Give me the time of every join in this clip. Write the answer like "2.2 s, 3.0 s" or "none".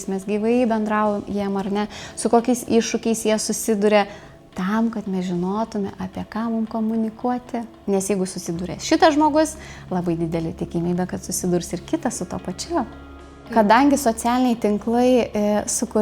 13.6 s